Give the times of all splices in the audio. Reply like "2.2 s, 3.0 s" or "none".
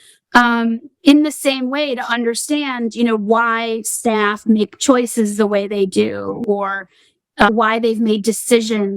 7.5 s